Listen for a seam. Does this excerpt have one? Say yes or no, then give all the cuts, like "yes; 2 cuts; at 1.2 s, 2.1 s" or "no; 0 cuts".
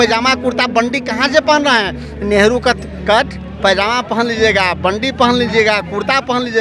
no; 0 cuts